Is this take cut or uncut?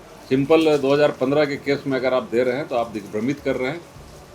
uncut